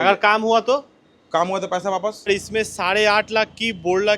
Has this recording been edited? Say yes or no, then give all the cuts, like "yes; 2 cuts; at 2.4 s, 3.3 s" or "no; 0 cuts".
yes; 1 cut; at 2.3 s